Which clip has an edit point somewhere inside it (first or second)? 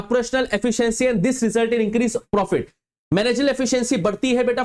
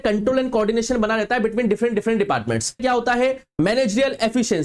second